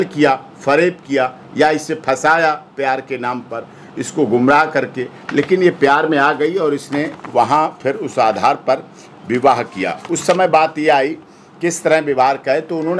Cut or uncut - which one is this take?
uncut